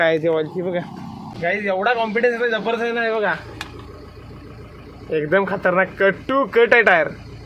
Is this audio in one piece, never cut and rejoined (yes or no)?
no